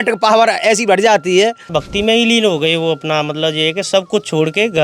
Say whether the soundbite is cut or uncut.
cut